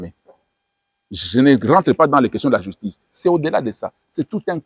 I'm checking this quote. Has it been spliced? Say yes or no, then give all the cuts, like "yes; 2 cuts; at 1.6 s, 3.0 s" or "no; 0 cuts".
no; 0 cuts